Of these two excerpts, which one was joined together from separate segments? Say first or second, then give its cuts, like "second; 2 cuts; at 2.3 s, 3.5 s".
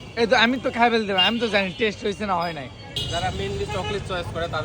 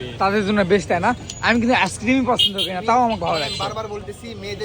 first; 1 cut; at 3.0 s